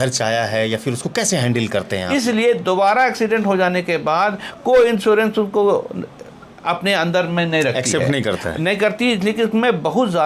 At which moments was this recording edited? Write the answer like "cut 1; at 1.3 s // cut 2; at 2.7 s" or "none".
cut 1; at 2.0 s